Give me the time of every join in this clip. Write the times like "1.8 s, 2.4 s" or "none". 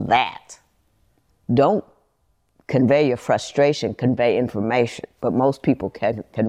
1.3 s